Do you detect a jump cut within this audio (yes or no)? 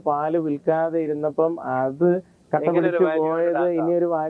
no